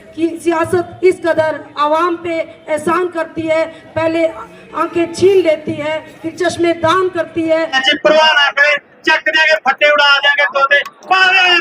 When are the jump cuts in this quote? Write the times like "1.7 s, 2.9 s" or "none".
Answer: 7.8 s